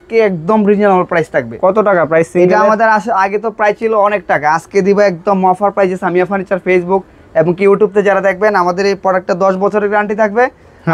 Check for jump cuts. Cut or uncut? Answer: uncut